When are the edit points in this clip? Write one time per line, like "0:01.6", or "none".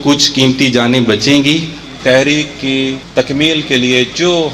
0:01.8
0:03.0